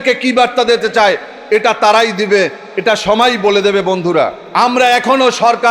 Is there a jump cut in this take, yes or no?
yes